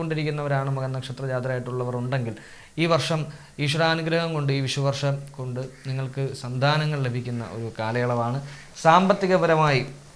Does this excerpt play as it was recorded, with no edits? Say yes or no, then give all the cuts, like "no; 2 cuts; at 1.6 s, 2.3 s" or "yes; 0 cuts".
yes; 0 cuts